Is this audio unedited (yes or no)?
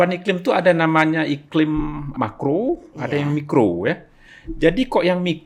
no